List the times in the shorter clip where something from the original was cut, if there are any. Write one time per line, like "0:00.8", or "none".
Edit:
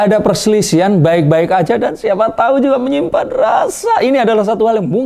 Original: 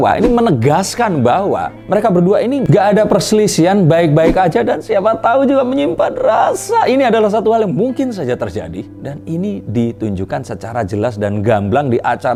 none

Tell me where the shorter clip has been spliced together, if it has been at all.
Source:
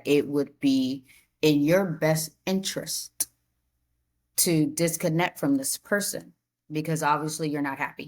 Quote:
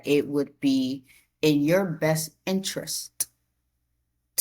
none

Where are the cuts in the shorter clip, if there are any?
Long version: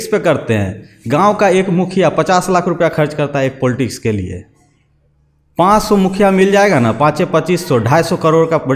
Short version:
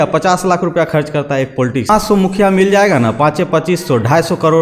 0:01.9

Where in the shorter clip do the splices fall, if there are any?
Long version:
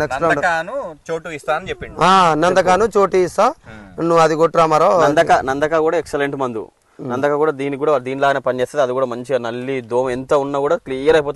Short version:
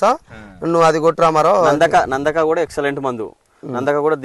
none

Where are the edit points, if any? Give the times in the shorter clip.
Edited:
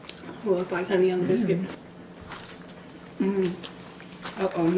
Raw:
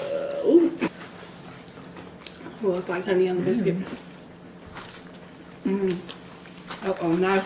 0:01.7

